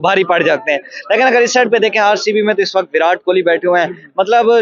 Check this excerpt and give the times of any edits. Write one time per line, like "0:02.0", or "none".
none